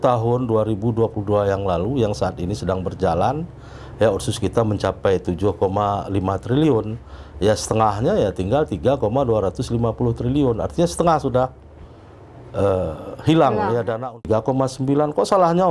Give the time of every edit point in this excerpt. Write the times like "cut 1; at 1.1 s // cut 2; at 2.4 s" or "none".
cut 1; at 14.2 s